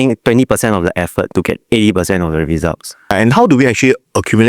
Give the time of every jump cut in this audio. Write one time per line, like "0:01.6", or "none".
0:03.1

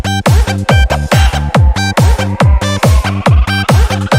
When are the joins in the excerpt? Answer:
none

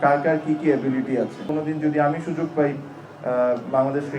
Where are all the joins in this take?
0:01.4

